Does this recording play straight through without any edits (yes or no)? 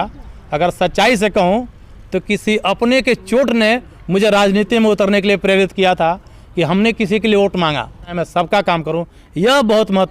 no